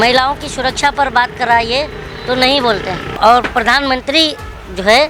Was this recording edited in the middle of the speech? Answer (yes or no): yes